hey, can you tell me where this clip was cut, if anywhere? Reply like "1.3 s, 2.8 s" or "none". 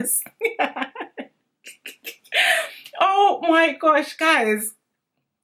none